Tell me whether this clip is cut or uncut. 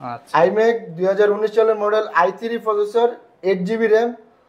uncut